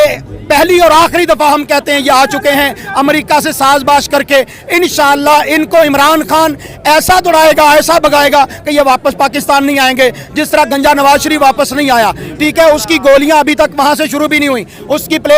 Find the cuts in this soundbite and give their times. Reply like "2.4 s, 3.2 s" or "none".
none